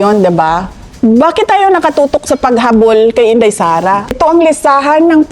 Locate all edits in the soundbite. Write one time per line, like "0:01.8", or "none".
0:04.2